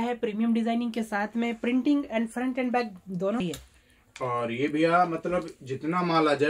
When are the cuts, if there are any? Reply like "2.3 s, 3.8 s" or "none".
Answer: 3.4 s